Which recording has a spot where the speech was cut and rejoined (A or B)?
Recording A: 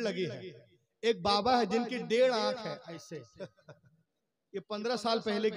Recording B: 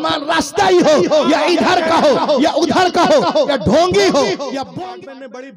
B